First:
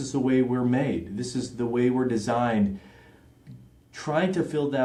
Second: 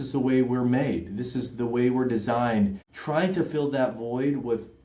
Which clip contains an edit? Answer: second; 1 cut; at 2.9 s

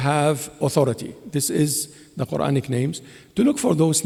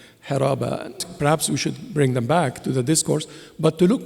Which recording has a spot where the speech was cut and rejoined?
second; 1 cut; at 1.1 s

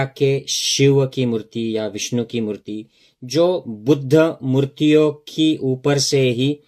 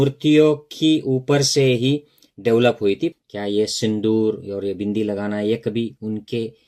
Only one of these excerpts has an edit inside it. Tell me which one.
second; 1 cut; at 3.1 s

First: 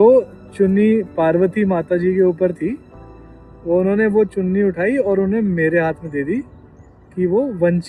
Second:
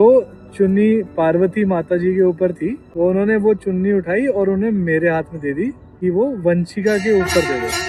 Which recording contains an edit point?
second; 2 cuts; at 2.8 s, 5.9 s

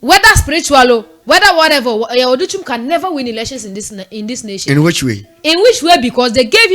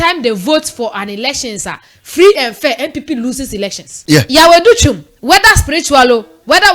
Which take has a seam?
second; 1 cut; at 3.9 s

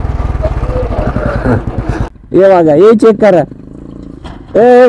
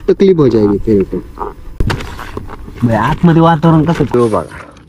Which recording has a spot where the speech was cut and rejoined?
second; 2 cuts; at 1.9 s, 4.1 s

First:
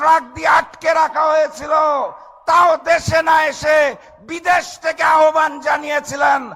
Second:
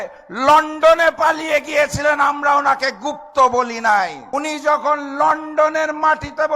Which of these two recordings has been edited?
second; 1 cut; at 4.2 s

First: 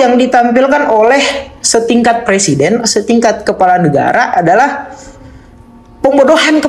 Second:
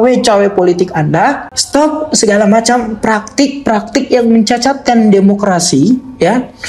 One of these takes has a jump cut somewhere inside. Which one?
second; 1 cut; at 1.5 s

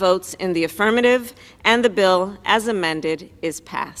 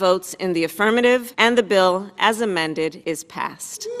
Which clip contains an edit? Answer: second; 2 cuts; at 1.3 s, 3.0 s

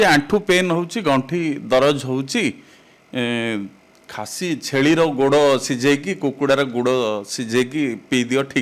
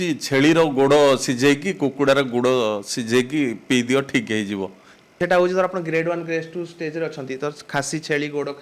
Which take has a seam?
second; 1 cut; at 5.2 s

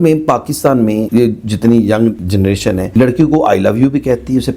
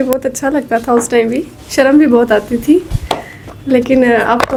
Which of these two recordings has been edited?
first; 2 cuts; at 1.1 s, 2.4 s

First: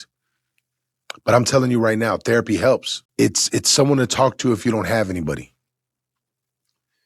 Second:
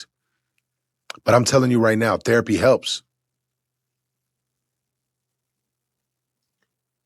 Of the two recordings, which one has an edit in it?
first; 1 cut; at 3.0 s

